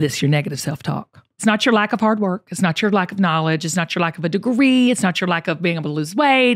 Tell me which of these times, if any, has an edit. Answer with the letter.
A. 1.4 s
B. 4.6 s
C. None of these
A